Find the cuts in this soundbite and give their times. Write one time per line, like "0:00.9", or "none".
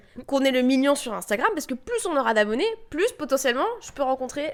none